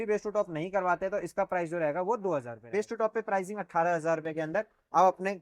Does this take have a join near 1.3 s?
no; 1 cut; at 2.6 s

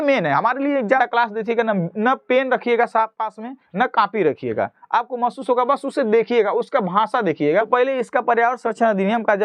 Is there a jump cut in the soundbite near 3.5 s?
no; 2 cuts; at 1.0 s, 7.7 s

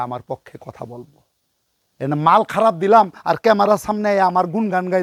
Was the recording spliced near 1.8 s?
no; 0 cuts

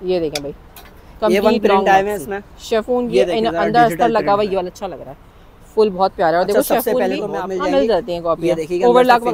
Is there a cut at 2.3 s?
no; 1 cut; at 7.3 s

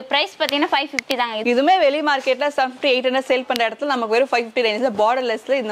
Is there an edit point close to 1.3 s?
no; 0 cuts

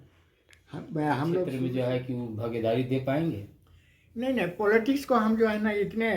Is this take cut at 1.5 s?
yes; 1 cut; at 1.5 s

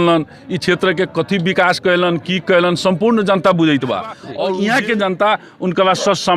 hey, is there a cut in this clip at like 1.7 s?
no; 1 cut; at 4.3 s

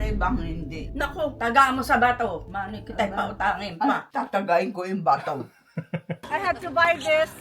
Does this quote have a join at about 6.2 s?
yes; 1 cut; at 6.2 s

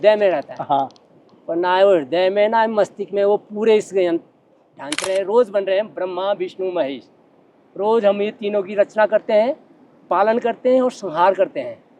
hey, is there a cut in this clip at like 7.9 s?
no; 1 cut; at 5.0 s

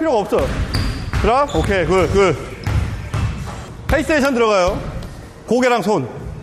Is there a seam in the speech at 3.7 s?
yes; 2 cuts; at 2.6 s, 3.7 s

